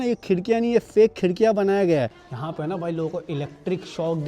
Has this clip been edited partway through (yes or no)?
yes